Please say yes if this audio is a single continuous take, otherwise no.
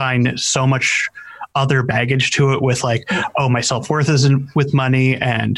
yes